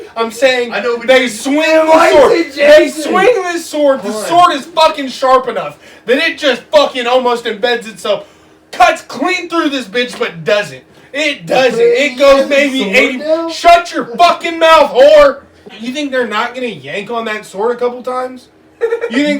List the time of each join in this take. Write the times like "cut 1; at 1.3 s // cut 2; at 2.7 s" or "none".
cut 1; at 15.8 s

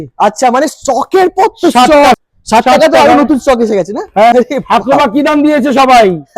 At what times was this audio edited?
cut 1; at 2.2 s // cut 2; at 4.3 s

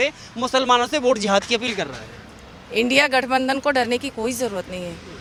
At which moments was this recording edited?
none

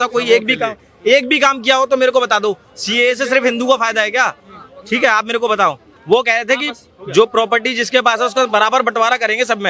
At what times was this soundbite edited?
cut 1; at 5.9 s

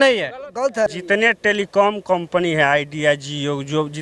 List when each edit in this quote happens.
cut 1; at 0.9 s

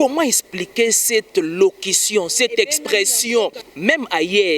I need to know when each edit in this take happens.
cut 1; at 3.7 s

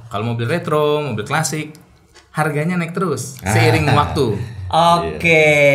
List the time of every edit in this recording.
none

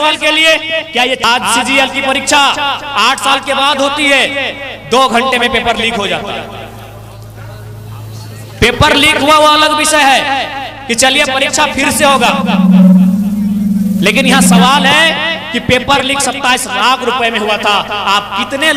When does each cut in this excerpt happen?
cut 1; at 1.2 s

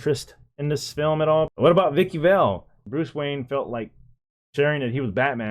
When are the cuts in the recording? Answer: cut 1; at 1.5 s // cut 2; at 2.8 s

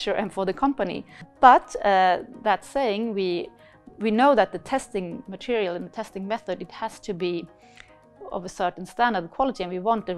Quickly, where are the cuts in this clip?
cut 1; at 1.2 s

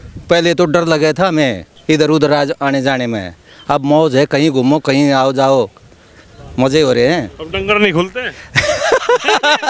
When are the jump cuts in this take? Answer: cut 1; at 1.7 s

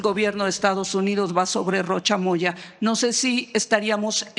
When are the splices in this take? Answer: none

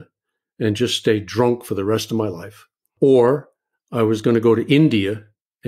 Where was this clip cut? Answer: cut 1; at 2.8 s

